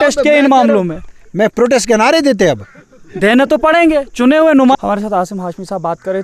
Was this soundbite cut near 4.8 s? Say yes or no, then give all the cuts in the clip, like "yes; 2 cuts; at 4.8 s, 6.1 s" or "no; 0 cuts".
yes; 1 cut; at 4.8 s